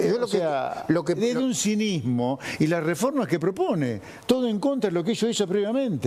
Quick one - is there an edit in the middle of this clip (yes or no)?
no